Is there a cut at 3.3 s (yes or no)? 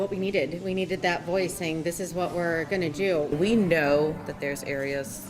yes